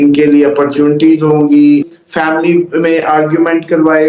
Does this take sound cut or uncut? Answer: cut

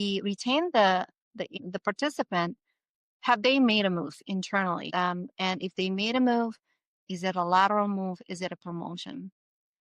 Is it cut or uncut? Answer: cut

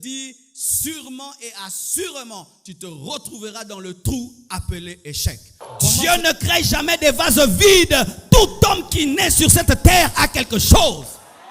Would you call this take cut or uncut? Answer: cut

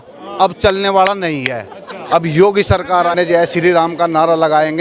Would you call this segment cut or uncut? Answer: cut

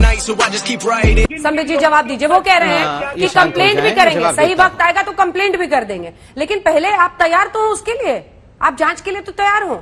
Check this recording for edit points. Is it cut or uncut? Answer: cut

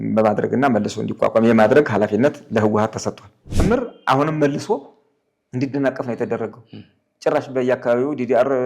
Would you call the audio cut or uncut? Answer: cut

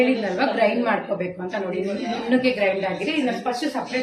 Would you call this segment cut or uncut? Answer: uncut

